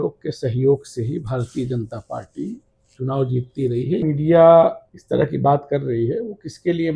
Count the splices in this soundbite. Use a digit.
2